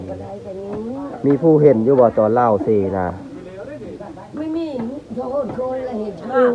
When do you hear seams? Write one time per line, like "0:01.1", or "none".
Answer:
none